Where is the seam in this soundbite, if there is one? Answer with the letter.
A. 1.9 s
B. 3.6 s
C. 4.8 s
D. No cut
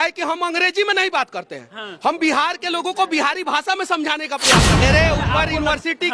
C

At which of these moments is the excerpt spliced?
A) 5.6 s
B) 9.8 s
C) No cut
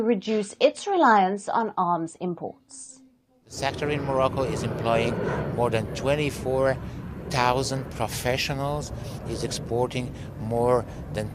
C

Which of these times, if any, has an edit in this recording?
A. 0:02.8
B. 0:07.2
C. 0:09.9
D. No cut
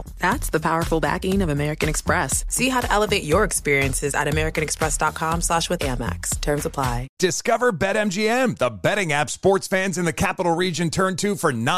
B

